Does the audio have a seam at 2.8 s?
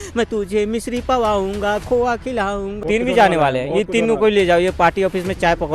yes; 1 cut; at 2.8 s

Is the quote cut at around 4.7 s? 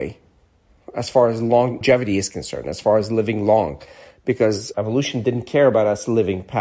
yes; 2 cuts; at 1.8 s, 4.7 s

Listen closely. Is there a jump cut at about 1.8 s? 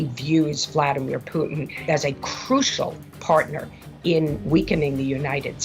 yes; 1 cut; at 1.8 s

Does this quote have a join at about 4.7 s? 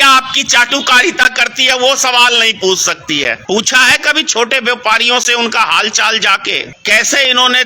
no; 2 cuts; at 3.4 s, 6.7 s

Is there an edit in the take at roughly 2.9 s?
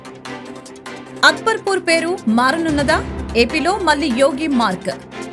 no; 1 cut; at 1.1 s

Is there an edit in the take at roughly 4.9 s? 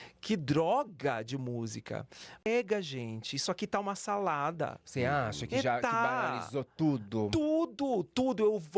no; 1 cut; at 2.5 s

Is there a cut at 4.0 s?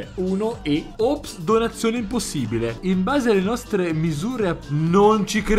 no; 1 cut; at 0.9 s

